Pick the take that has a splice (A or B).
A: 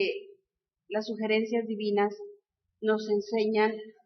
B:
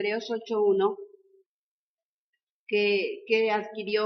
A